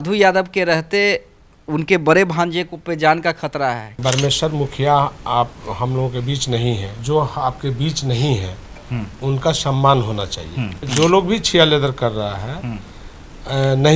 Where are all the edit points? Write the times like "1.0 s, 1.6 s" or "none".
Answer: 3.9 s, 7.0 s, 10.8 s

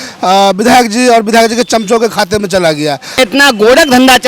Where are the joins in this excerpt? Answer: 3.2 s

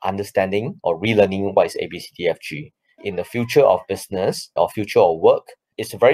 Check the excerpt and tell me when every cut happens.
3.0 s

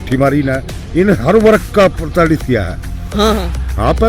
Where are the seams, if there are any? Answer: 3.0 s

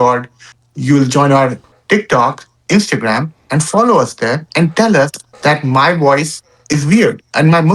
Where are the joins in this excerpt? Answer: 1.7 s

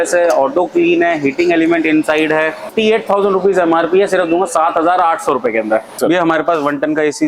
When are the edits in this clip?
2.7 s, 6.0 s

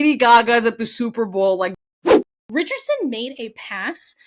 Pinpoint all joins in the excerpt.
1.8 s, 2.4 s

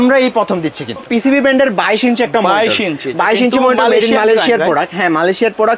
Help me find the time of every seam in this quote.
1.0 s

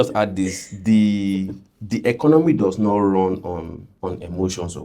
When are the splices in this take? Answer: 3.8 s

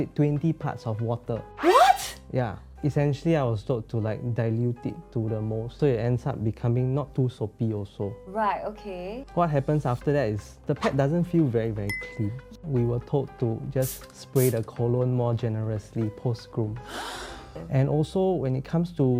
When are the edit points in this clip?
none

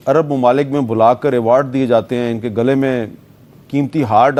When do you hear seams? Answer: none

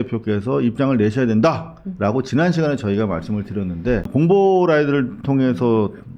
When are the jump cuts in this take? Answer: 4.1 s

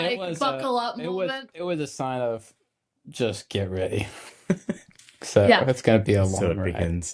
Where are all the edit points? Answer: none

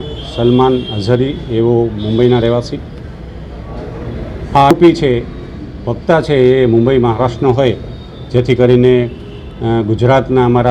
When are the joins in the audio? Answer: 4.7 s

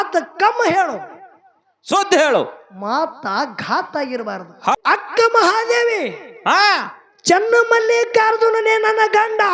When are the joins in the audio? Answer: 4.8 s

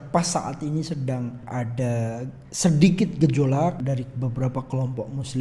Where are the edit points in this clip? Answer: 1.4 s, 3.8 s

